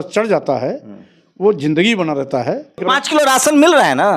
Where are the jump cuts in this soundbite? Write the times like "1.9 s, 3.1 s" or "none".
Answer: 2.8 s

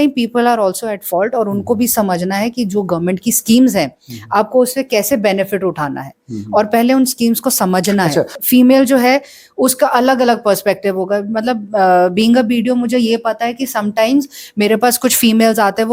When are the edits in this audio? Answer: 8.3 s

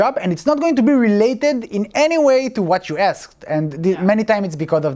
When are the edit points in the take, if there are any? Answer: none

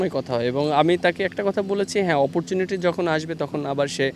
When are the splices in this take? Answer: none

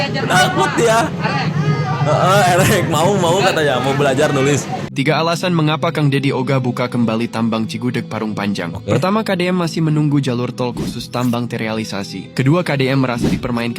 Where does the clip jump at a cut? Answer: 4.9 s

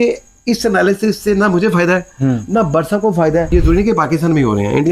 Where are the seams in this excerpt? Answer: 3.5 s

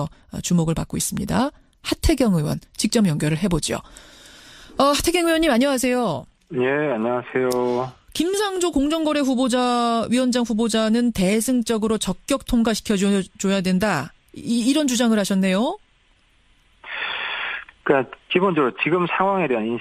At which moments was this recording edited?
2.6 s

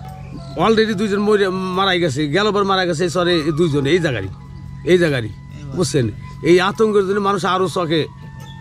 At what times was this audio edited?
none

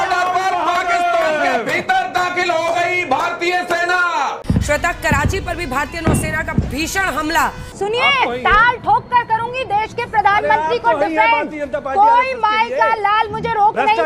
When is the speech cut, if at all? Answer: 4.4 s, 7.6 s

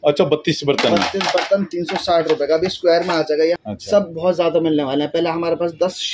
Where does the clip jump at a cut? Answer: 3.6 s

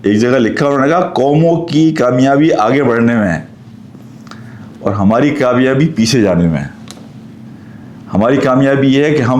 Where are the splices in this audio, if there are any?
none

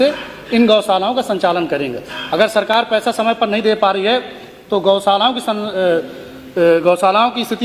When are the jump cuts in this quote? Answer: none

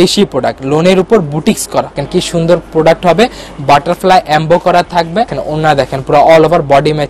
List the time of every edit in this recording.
2.0 s, 5.4 s

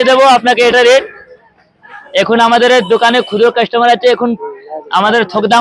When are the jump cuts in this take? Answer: none

